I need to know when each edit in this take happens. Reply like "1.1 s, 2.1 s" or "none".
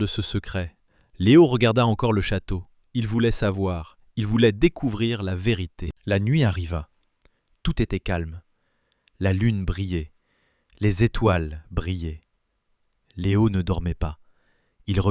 none